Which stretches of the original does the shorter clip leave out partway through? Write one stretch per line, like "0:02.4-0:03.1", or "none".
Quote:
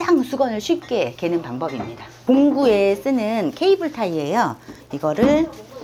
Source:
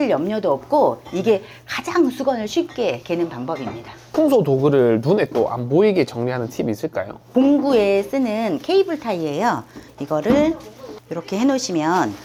0:04.0-0:07.2

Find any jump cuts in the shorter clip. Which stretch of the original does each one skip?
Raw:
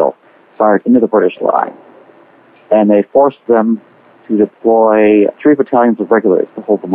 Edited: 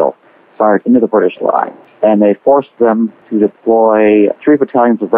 0:01.8-0:02.5
0:03.9-0:04.2

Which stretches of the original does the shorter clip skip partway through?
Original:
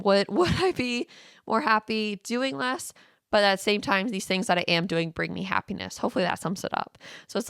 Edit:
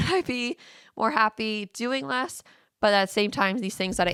none

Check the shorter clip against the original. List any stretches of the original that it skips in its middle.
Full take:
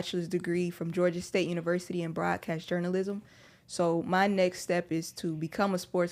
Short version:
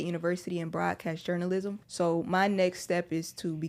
0:03.3-0:03.6

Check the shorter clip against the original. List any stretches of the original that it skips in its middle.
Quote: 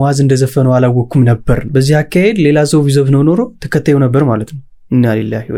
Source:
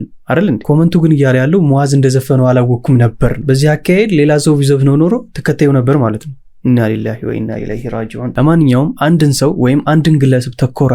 none

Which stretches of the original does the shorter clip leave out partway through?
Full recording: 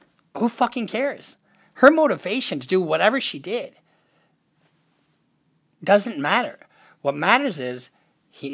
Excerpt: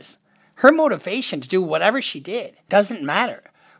0:03.7-0:05.7

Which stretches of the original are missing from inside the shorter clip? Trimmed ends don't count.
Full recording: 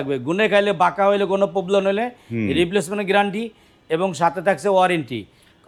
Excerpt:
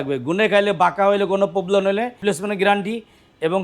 0:02.2-0:02.7

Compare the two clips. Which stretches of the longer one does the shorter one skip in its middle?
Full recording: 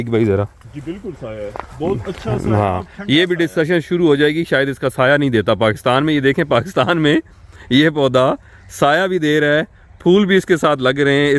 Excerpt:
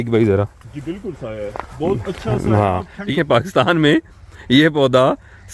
0:03.1-0:06.3

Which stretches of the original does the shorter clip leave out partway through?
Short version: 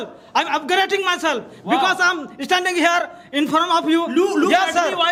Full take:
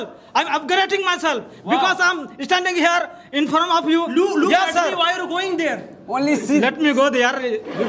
none

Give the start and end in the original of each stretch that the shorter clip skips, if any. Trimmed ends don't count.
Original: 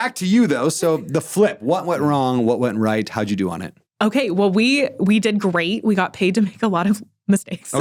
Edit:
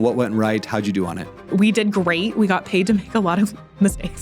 0:03.9-0:04.9

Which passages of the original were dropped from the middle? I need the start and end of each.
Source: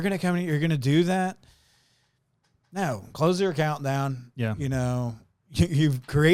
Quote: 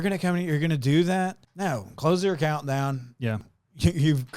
0:01.5-0:02.6
0:04.6-0:05.2

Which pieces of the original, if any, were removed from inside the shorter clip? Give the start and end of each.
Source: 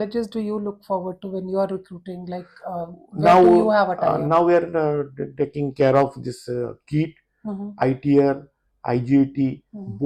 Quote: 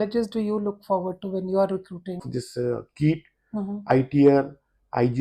0:02.2-0:06.1

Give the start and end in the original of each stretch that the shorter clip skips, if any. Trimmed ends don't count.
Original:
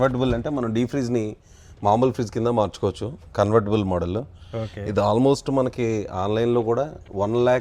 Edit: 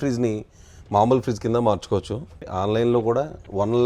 0:03.3-0:06.0

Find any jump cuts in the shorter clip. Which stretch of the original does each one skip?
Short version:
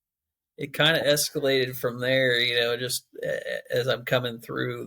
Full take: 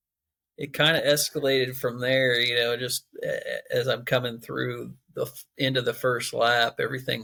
none

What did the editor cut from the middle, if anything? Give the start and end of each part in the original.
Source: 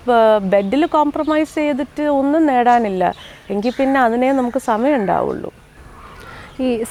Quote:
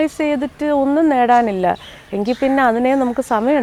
none

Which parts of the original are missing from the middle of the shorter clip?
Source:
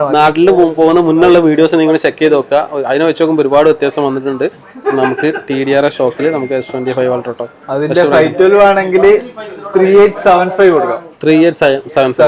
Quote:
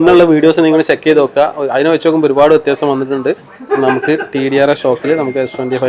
none

